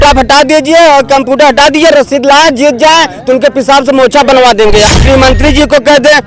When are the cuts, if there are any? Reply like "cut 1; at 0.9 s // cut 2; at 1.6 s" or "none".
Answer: cut 1; at 4.9 s